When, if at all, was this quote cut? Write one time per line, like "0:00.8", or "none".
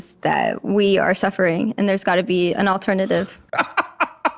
0:03.4